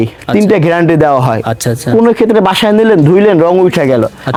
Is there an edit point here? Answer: no; 0 cuts

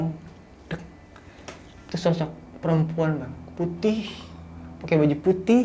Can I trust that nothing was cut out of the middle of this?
no; 1 cut; at 3.3 s

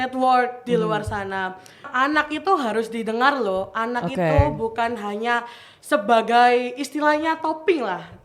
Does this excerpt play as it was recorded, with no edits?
no; 1 cut; at 1.9 s

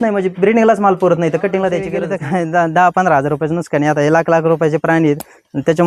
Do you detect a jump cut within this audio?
yes; 1 cut; at 2.0 s

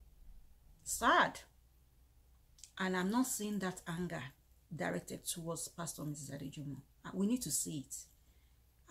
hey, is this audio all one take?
yes; 0 cuts

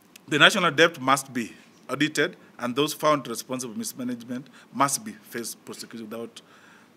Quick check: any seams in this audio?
no; 0 cuts

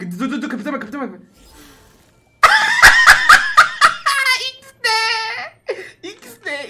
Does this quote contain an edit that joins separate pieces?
no; 0 cuts

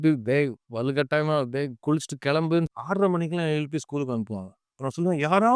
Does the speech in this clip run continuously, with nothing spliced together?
no; 1 cut; at 2.7 s

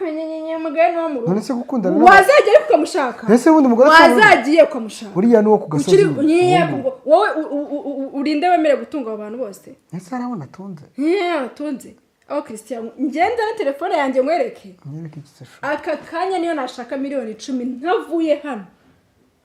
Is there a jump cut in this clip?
no; 0 cuts

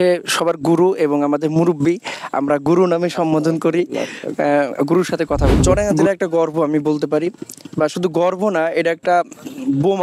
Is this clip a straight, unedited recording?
no; 1 cut; at 5.6 s

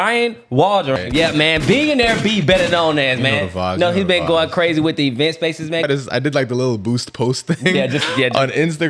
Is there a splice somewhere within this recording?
yes; 2 cuts; at 1.0 s, 5.8 s

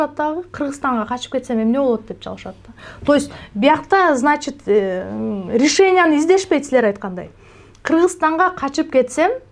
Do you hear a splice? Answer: no; 0 cuts

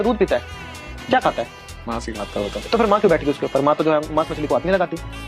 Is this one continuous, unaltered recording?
yes; 0 cuts

